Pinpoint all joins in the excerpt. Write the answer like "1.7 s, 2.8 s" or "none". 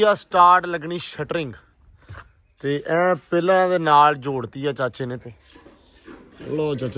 none